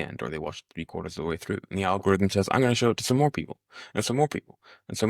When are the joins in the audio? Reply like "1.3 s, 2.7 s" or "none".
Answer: none